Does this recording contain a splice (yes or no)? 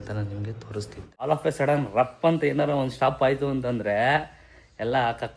yes